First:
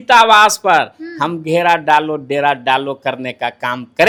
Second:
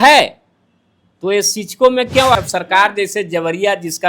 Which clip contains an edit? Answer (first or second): second